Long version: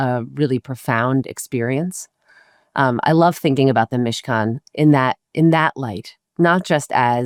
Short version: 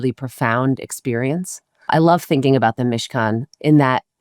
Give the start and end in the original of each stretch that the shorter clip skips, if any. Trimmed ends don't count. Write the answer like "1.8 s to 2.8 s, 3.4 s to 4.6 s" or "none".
2.3 s to 3.0 s